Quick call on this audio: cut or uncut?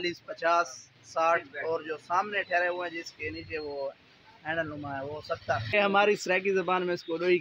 cut